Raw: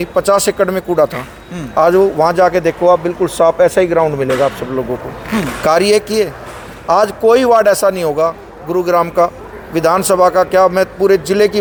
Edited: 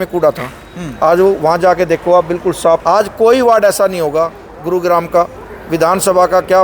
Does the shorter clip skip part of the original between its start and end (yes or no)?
yes